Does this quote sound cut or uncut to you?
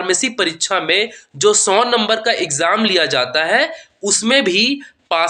uncut